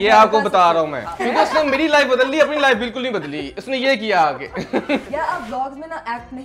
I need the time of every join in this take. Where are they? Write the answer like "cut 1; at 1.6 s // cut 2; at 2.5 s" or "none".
cut 1; at 1.1 s // cut 2; at 5.1 s